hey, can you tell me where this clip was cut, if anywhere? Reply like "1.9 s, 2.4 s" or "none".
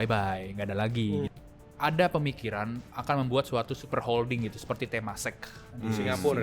1.3 s